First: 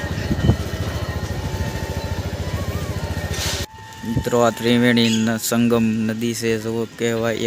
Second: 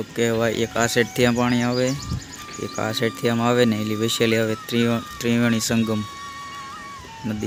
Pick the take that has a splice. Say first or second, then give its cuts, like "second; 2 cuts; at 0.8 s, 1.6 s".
first; 1 cut; at 3.7 s